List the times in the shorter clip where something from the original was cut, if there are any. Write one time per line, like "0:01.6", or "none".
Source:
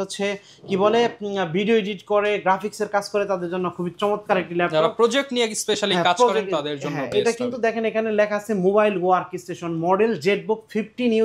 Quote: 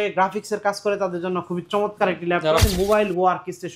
0:02.6